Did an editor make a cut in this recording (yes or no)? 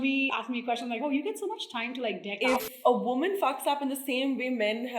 yes